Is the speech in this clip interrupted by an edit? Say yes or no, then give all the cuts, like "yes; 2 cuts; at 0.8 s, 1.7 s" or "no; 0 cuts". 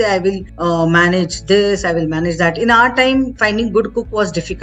no; 0 cuts